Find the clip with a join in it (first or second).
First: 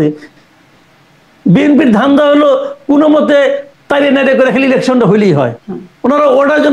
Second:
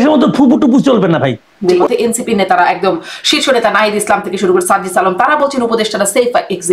second